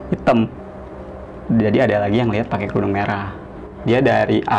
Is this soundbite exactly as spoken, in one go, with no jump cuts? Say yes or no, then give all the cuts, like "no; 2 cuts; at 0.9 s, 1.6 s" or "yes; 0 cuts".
no; 1 cut; at 3.7 s